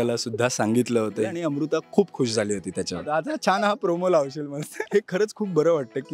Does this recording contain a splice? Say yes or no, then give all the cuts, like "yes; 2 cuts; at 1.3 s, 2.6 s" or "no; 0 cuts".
yes; 3 cuts; at 1.3 s, 3.0 s, 4.8 s